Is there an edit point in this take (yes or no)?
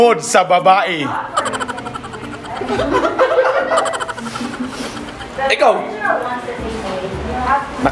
no